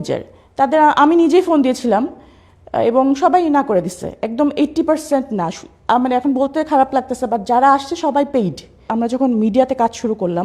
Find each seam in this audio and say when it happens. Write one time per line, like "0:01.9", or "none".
0:08.9